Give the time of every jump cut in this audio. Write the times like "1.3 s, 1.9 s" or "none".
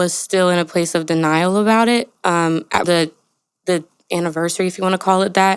2.8 s

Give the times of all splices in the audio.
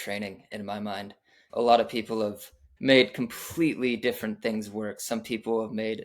1.4 s, 2.6 s

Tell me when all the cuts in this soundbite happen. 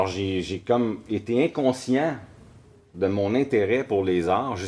2.2 s

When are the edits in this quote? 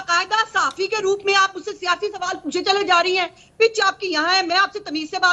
none

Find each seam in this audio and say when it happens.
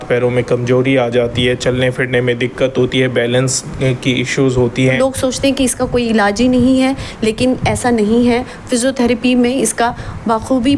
4.9 s

